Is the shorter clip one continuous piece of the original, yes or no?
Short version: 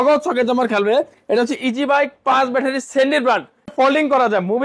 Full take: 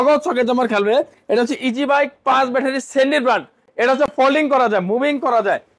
no